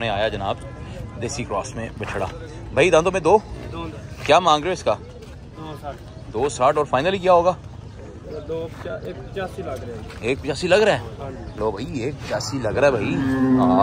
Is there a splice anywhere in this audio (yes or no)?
no